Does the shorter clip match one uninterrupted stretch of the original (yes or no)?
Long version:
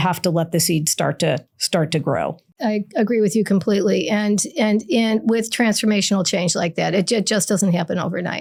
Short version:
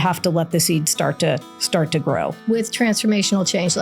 no